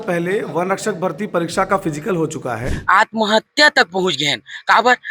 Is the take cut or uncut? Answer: cut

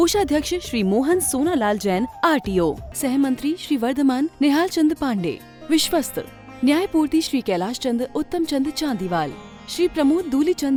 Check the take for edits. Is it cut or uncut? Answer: uncut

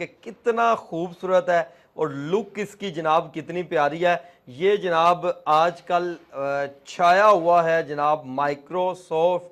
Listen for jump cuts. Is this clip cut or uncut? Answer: uncut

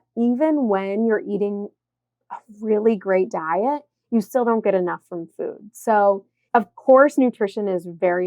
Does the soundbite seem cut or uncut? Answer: cut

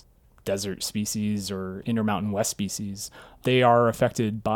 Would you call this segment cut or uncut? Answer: cut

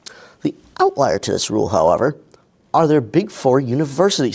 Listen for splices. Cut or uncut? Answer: uncut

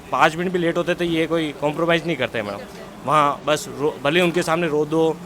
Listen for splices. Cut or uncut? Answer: uncut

